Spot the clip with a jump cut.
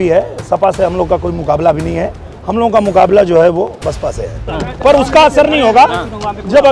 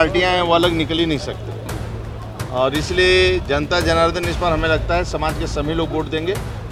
first; 1 cut; at 4.5 s

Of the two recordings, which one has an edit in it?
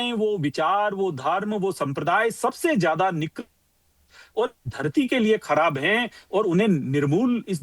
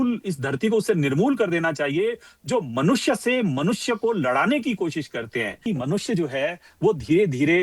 second; 1 cut; at 5.6 s

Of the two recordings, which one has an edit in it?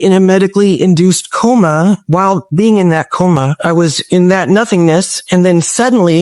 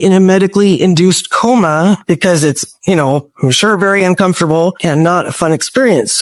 first; 2 cuts; at 2.0 s, 3.8 s

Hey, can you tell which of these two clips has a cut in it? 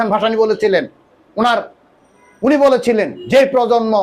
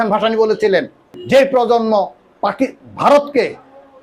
second; 1 cut; at 1.2 s

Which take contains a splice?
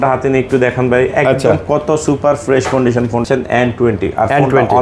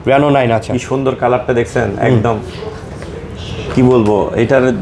first; 1 cut; at 3.2 s

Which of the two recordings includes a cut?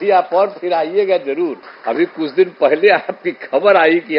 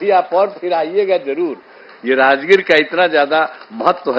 first; 1 cut; at 1.7 s

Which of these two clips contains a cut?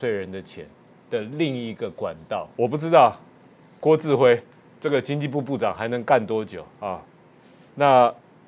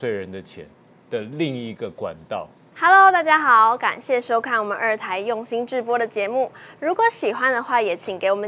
first; 1 cut; at 2.4 s

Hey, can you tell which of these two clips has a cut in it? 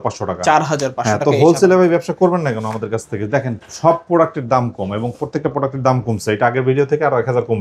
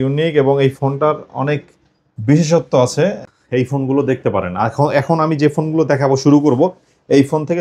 second; 1 cut; at 3.2 s

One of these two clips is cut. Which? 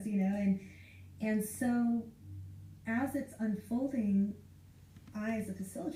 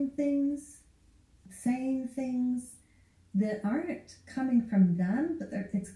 second; 1 cut; at 1.4 s

